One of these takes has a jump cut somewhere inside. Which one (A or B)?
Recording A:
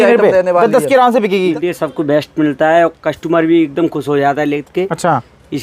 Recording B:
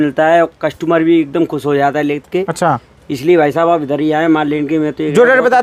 A